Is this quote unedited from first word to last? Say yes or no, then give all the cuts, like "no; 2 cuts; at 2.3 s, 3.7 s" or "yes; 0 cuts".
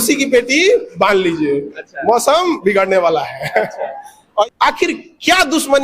no; 1 cut; at 4.4 s